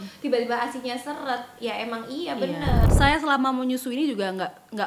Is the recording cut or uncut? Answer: cut